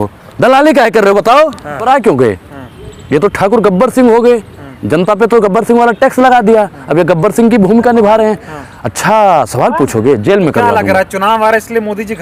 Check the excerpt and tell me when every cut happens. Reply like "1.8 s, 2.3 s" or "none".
1.8 s